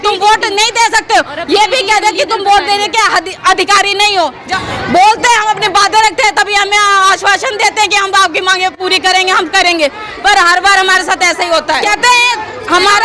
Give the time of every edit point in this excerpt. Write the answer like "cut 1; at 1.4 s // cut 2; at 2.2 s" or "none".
cut 1; at 4.4 s // cut 2; at 11.8 s